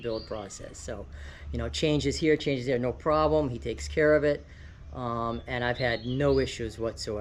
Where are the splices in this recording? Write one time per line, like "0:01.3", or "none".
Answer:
none